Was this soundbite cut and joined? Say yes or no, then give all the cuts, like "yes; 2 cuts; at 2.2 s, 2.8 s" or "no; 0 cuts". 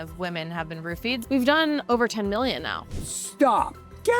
yes; 2 cuts; at 1.2 s, 1.8 s